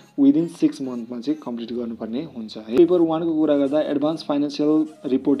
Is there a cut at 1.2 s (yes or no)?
no